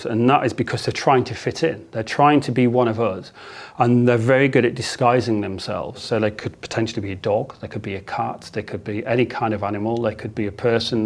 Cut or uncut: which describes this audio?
cut